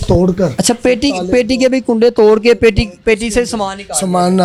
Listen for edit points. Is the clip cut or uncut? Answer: uncut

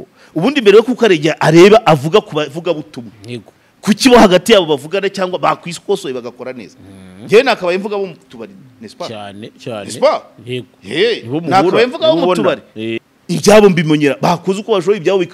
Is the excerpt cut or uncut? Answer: cut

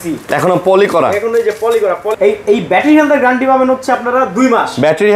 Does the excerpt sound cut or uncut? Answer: cut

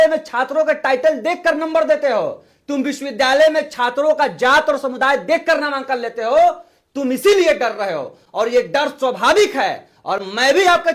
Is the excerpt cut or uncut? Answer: uncut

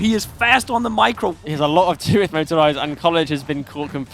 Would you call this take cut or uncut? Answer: cut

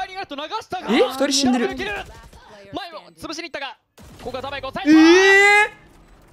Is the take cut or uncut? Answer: uncut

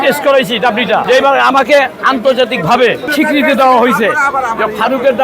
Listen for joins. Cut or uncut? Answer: cut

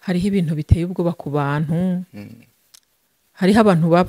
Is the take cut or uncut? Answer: uncut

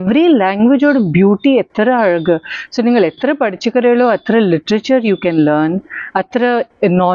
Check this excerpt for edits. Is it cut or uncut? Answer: uncut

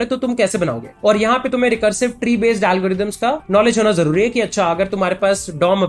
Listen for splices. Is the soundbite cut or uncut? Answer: uncut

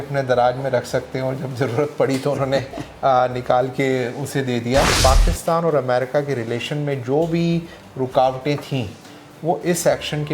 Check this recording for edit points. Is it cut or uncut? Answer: cut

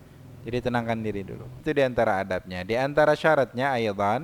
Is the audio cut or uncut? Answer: cut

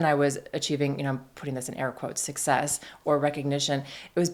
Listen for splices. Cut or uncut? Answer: uncut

